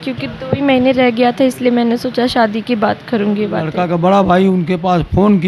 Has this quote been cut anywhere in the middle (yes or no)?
yes